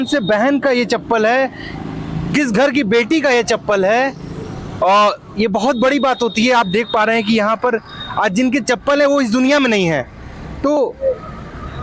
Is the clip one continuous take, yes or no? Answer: yes